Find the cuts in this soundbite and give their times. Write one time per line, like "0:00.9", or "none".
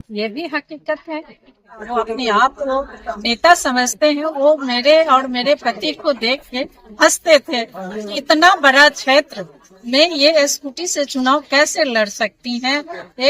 0:01.7